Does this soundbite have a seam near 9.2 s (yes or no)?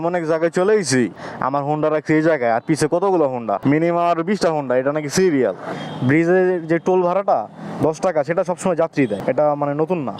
yes